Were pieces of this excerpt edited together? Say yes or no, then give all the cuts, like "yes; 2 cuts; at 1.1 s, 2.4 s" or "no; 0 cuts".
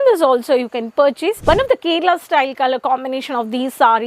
yes; 1 cut; at 1.4 s